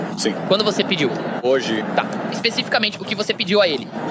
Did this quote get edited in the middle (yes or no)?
yes